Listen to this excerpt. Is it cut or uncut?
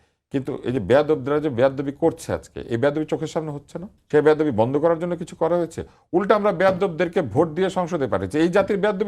cut